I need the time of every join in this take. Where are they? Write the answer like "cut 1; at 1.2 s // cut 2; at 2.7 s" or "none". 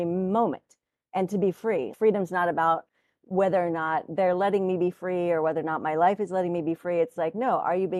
none